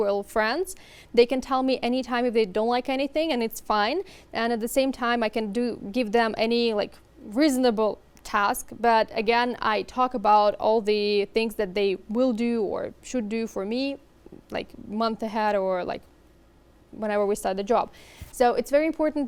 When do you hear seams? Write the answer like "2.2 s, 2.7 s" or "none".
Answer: none

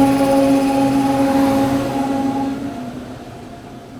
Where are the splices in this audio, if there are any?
none

